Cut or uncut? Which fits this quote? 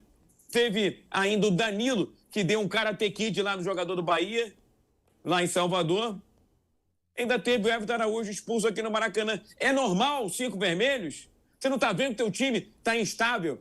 uncut